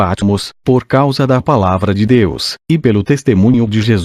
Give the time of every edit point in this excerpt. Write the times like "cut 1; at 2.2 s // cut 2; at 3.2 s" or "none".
none